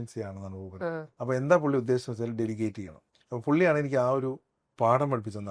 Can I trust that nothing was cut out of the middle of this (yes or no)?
no